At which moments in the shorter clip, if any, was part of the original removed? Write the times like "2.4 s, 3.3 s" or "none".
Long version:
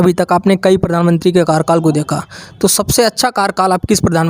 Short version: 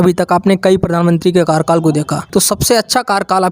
2.2 s